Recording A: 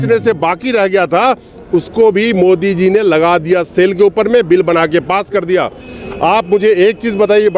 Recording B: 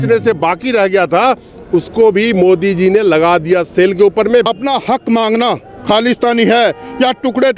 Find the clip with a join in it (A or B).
B